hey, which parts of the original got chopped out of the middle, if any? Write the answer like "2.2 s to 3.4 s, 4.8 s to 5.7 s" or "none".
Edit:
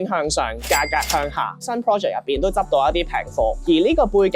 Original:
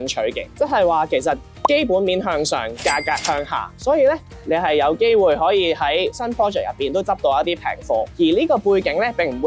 3.8 s to 6.1 s